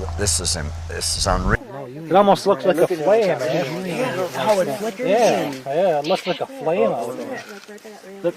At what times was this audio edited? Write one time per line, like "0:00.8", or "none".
0:01.6